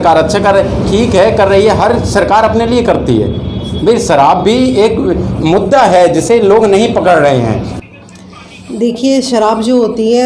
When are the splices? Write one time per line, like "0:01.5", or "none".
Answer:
0:07.7